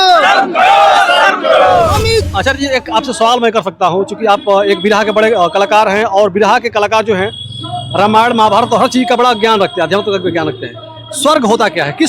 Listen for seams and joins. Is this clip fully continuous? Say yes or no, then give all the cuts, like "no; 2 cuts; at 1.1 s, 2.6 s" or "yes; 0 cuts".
no; 1 cut; at 2.3 s